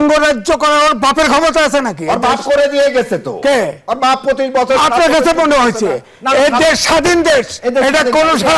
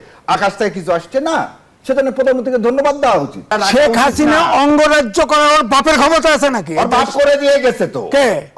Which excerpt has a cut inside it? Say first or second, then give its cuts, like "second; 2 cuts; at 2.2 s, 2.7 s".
second; 1 cut; at 3.5 s